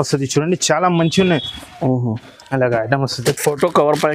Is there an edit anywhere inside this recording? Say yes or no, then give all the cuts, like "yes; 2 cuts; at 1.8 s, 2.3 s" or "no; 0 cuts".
yes; 1 cut; at 3.1 s